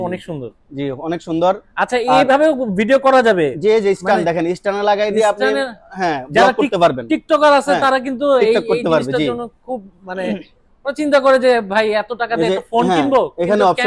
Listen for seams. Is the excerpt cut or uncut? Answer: uncut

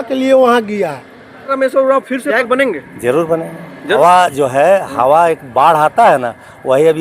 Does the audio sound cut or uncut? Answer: cut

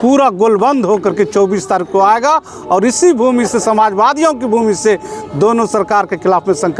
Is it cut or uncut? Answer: uncut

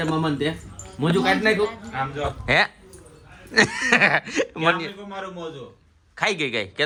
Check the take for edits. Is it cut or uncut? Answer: uncut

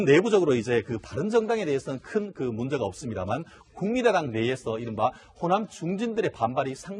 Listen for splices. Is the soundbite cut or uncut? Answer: cut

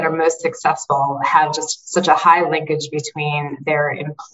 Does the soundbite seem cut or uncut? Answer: uncut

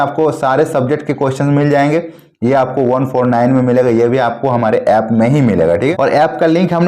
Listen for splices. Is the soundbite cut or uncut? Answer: cut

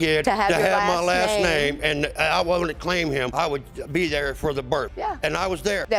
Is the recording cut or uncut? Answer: uncut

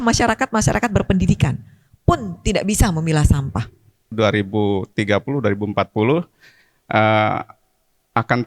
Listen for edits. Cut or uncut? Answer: cut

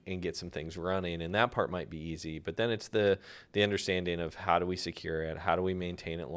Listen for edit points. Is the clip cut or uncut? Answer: uncut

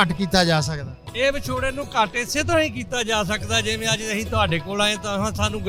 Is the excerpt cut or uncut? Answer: uncut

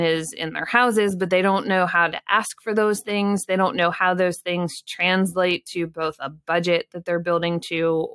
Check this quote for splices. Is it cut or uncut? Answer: uncut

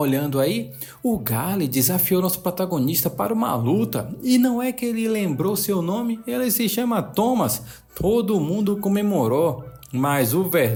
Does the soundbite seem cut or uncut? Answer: uncut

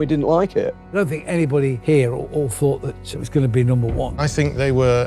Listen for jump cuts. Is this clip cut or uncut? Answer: cut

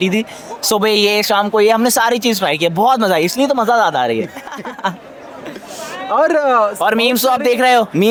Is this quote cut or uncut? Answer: uncut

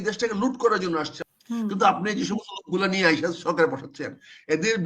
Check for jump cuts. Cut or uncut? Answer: cut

